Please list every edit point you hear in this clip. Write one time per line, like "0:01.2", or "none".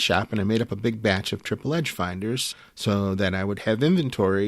0:02.5